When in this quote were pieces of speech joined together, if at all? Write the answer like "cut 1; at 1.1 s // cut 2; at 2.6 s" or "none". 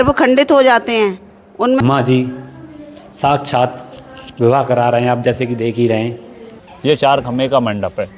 cut 1; at 1.8 s // cut 2; at 6.6 s

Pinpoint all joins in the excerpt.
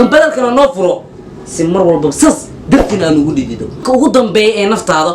cut 1; at 3.6 s

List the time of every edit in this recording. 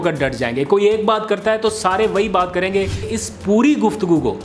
cut 1; at 3.1 s

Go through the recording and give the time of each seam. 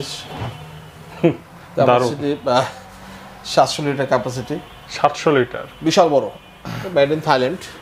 cut 1; at 6.8 s

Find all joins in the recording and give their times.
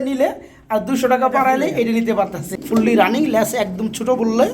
cut 1; at 2.5 s

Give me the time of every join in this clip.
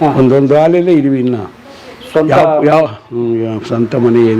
none

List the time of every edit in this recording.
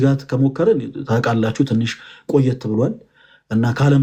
none

